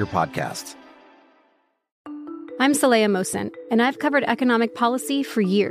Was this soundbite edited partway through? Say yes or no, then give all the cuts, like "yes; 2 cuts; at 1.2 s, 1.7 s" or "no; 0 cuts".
yes; 1 cut; at 1.9 s